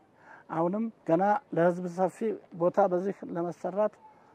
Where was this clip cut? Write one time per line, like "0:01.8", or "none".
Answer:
0:01.0
0:02.5